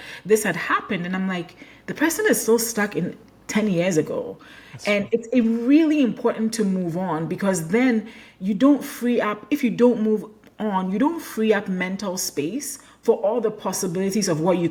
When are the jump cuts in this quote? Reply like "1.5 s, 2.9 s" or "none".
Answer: none